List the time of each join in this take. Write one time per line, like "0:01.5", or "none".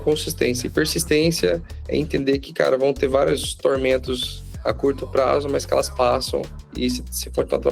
0:01.7
0:06.6